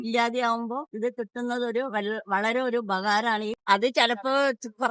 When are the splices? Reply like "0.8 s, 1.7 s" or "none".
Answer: 3.6 s